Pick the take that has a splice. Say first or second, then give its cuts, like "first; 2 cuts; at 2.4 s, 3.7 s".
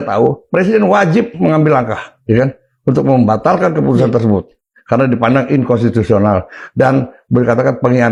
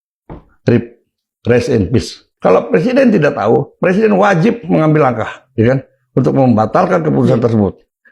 second; 1 cut; at 2.3 s